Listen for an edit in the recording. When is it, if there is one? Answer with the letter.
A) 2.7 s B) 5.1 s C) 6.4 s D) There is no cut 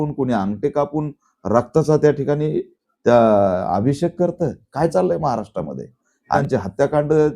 C